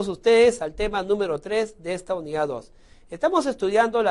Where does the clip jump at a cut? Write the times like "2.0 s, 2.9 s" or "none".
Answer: none